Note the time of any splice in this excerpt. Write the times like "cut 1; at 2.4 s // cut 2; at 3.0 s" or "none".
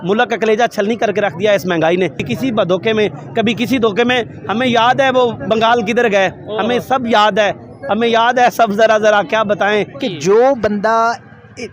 cut 1; at 2.3 s // cut 2; at 10.0 s